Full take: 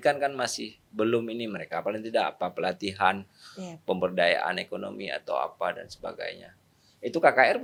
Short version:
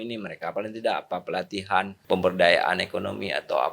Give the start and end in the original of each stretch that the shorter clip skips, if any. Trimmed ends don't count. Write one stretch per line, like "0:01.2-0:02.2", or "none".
0:03.3-0:03.7